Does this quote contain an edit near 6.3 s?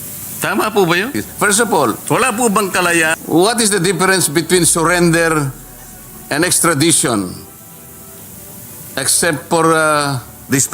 no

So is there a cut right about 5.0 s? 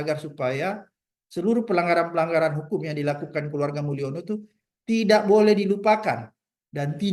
no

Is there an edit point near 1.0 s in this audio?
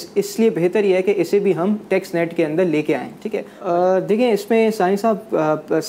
no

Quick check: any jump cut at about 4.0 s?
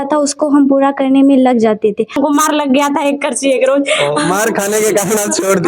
no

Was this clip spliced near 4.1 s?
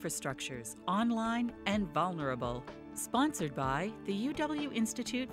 no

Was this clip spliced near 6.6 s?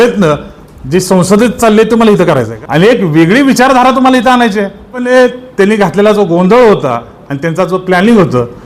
no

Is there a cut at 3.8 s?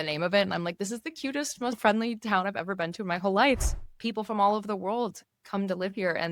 yes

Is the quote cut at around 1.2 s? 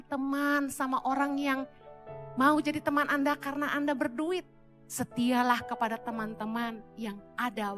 no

